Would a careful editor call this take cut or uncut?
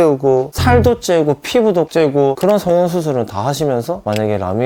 uncut